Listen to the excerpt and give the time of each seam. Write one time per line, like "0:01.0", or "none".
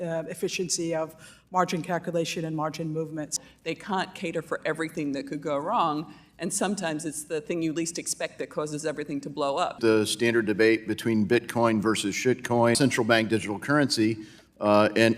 0:03.3
0:09.8
0:12.8